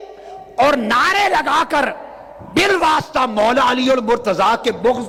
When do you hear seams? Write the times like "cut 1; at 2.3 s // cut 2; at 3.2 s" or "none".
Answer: none